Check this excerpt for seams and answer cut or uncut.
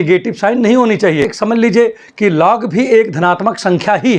cut